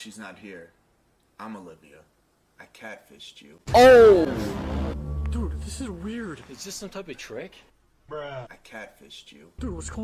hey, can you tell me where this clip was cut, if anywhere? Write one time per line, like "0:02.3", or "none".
none